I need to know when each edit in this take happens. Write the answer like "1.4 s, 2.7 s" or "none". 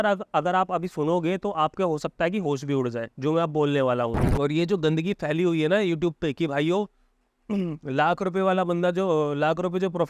4.2 s